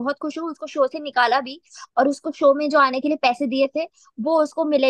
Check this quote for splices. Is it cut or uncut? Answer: uncut